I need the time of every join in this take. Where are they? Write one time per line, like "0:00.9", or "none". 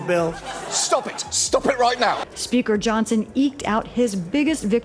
0:02.2